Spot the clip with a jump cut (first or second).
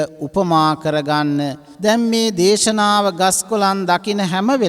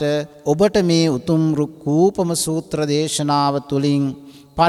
first